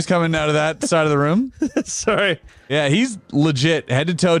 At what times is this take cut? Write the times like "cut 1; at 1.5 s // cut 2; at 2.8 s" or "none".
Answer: cut 1; at 2.7 s